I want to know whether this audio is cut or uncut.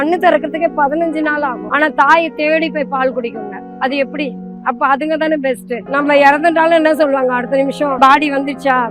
cut